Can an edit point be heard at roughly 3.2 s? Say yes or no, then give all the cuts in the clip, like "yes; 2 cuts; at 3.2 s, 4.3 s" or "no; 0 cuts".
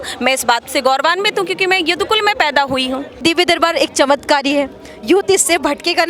yes; 1 cut; at 3.2 s